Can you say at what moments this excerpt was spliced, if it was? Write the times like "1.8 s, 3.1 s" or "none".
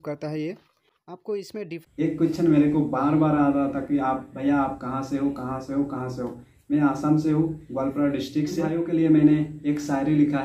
1.7 s, 8.7 s